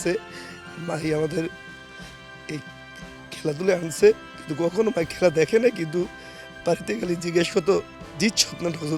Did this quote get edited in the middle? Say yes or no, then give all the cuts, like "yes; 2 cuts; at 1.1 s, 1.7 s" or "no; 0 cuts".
no; 0 cuts